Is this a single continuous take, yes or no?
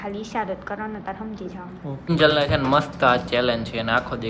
no